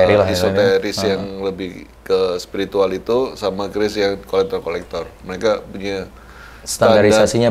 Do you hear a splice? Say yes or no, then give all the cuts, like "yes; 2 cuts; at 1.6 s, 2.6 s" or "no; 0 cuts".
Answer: no; 0 cuts